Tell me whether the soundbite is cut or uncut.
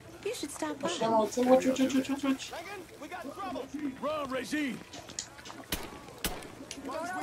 uncut